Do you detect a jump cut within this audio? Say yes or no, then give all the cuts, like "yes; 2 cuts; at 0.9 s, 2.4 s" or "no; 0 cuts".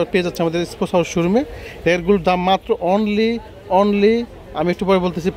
no; 0 cuts